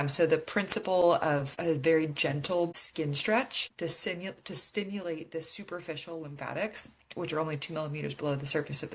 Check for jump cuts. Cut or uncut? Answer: cut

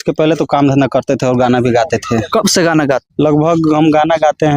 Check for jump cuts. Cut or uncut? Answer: cut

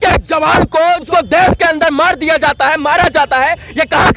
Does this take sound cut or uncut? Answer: cut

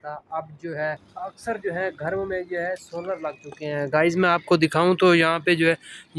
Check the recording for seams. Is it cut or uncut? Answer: cut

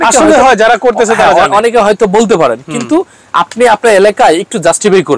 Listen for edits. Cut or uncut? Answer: uncut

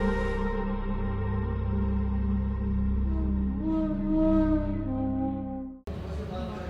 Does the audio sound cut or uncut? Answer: cut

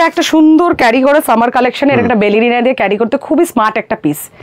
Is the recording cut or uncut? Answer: uncut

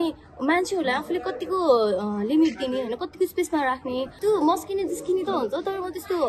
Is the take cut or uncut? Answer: cut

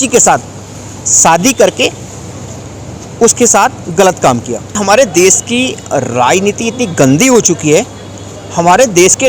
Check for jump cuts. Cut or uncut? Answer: cut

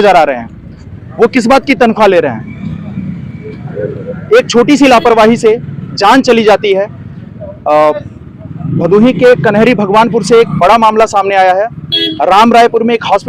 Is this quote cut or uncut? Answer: uncut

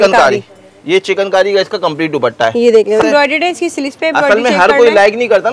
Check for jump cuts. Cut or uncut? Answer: cut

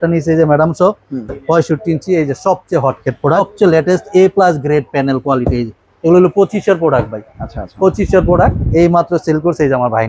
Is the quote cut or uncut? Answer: cut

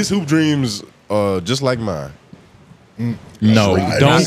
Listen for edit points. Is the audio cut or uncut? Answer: uncut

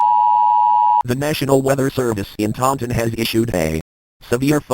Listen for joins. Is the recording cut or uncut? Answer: cut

